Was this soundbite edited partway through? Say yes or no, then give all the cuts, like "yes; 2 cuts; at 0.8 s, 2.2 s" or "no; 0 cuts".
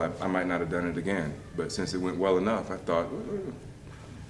yes; 1 cut; at 2.4 s